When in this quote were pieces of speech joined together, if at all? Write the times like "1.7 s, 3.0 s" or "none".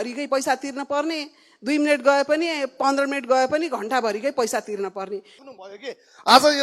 5.4 s